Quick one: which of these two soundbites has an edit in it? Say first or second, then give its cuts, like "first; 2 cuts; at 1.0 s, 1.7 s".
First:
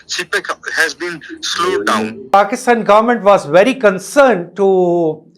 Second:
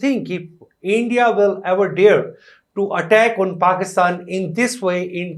first; 1 cut; at 2.3 s